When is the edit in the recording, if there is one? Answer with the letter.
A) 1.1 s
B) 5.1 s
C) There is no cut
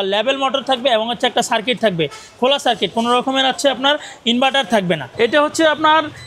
B